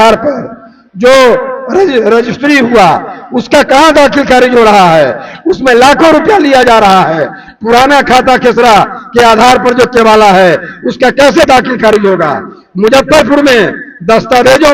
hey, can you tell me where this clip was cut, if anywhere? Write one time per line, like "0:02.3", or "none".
none